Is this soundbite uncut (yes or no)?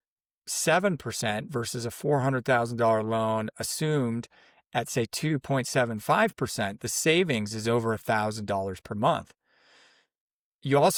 yes